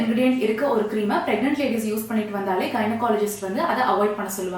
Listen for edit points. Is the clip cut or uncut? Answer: uncut